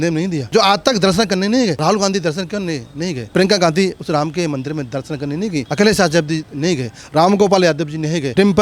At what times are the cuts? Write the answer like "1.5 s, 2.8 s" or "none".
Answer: none